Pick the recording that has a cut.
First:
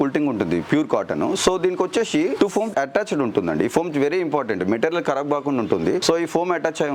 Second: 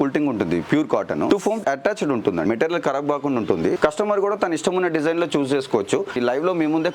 second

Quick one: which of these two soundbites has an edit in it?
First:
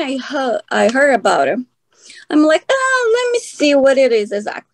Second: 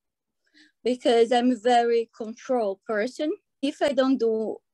second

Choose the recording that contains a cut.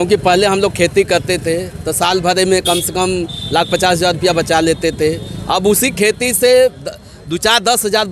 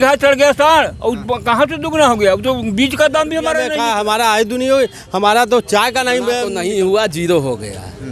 second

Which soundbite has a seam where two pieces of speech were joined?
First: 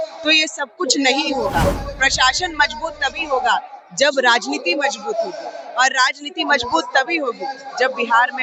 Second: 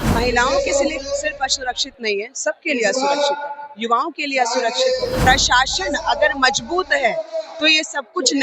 second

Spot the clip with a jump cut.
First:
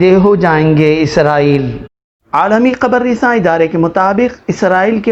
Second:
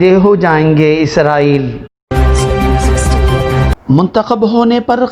second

